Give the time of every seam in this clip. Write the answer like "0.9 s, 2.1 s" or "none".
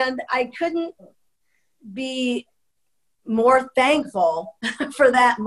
none